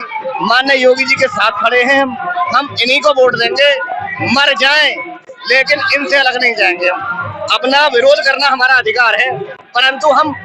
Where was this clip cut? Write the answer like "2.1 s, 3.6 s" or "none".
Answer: none